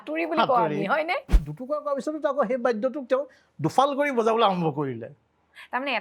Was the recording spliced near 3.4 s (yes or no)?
no